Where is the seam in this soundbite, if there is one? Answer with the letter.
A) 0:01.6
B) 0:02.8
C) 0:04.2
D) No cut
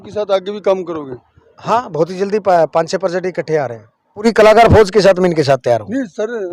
C